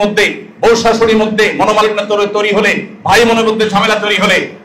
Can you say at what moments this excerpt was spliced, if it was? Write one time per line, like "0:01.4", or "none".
none